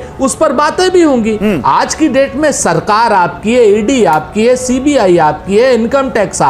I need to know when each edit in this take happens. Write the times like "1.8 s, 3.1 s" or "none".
none